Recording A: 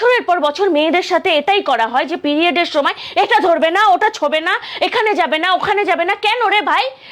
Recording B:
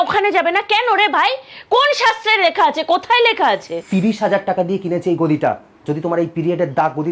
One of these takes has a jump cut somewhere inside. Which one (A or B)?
B